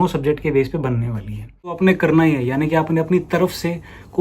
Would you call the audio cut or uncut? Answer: cut